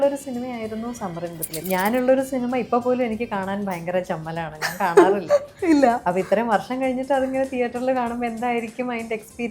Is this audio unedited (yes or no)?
no